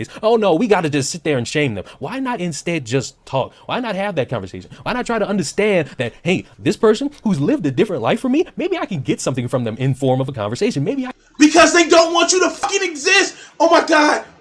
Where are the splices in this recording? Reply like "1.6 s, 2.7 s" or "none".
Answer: 12.6 s

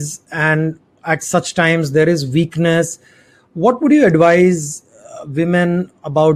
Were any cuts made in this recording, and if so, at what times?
none

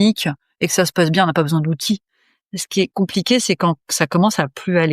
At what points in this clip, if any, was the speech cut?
2.9 s

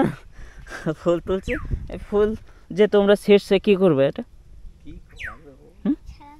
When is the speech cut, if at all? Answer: none

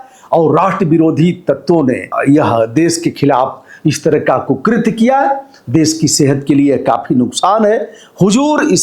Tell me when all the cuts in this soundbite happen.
2.1 s

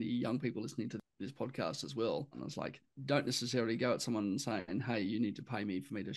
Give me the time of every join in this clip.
1.1 s, 2.5 s

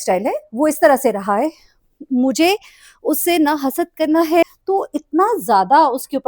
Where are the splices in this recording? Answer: 4.4 s

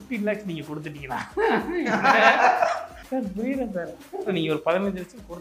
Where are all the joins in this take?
2.9 s

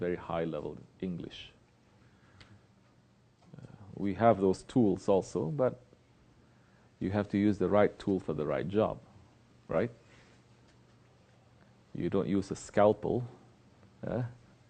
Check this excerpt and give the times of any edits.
none

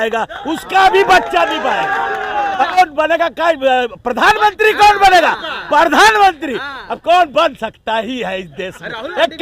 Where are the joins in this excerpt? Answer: 2.8 s

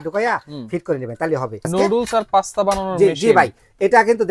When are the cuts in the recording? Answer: 1.7 s

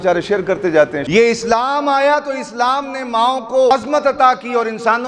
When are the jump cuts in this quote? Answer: 1.0 s, 3.7 s

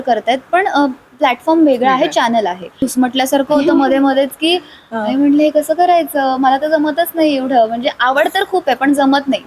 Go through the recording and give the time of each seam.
2.8 s

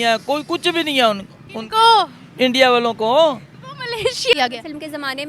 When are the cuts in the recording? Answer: 4.3 s

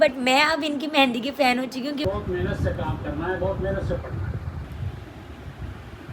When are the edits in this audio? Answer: 2.0 s, 4.6 s

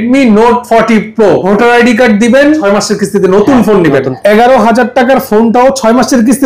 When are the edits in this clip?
1.4 s, 2.6 s, 4.1 s

